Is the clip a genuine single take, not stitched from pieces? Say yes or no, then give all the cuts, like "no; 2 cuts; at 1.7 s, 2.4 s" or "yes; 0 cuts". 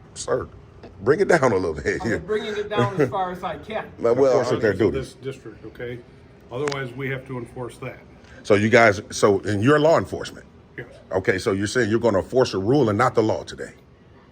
no; 1 cut; at 4.4 s